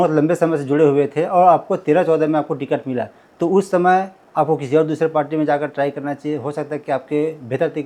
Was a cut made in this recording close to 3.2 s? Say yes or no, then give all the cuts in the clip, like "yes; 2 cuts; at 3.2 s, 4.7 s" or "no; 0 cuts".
no; 0 cuts